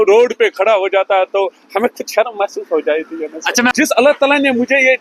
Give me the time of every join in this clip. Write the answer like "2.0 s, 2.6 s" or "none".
3.7 s